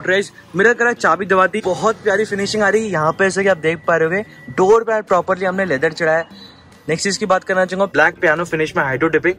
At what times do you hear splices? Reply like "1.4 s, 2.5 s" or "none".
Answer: 1.6 s, 7.9 s